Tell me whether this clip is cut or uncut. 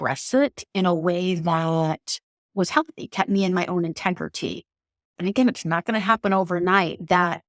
cut